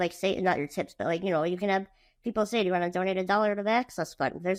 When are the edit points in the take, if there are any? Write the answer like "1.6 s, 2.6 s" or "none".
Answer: none